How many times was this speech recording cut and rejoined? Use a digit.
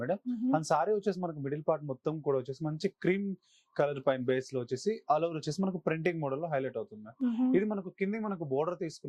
0